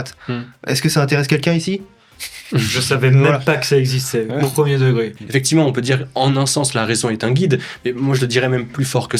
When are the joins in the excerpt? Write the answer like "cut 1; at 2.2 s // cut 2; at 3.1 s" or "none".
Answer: cut 1; at 5.1 s